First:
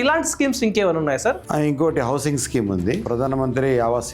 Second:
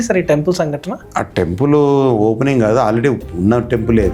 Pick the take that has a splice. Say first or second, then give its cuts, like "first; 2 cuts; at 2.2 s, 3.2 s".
first; 1 cut; at 3.0 s